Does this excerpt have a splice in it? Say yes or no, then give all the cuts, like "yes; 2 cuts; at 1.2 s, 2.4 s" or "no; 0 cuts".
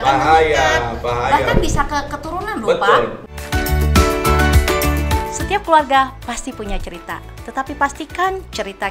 yes; 1 cut; at 3.3 s